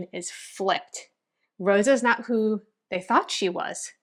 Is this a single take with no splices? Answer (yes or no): yes